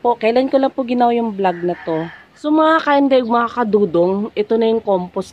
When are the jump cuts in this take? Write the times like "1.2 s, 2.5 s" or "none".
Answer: 2.2 s